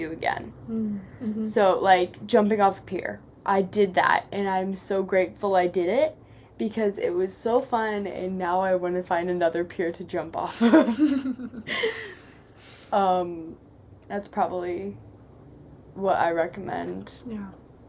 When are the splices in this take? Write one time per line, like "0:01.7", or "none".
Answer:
none